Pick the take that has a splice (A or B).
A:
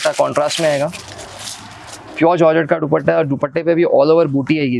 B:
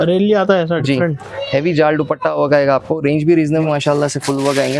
B